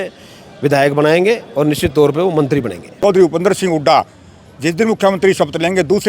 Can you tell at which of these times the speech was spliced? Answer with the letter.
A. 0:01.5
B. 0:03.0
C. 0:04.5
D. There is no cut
B